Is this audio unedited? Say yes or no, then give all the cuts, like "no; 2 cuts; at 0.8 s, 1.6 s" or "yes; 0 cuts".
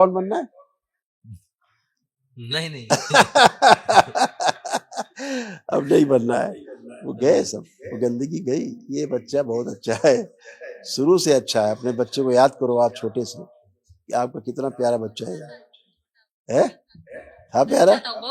yes; 0 cuts